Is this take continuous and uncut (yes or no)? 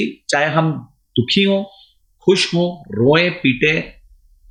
yes